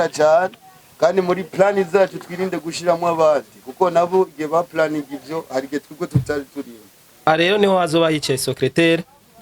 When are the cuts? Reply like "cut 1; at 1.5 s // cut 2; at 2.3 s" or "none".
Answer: cut 1; at 7.2 s